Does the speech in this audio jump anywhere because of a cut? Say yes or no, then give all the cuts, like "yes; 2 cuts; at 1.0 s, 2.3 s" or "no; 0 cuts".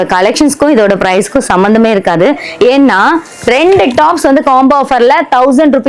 no; 0 cuts